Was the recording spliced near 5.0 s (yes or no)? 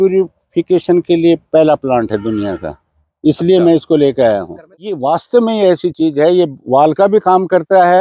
yes